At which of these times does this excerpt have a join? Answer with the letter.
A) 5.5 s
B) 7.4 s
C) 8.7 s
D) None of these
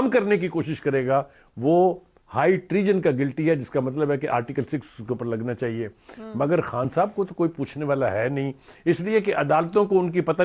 D